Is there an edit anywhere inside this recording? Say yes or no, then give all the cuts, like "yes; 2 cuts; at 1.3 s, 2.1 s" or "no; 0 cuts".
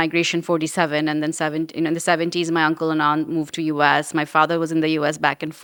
no; 0 cuts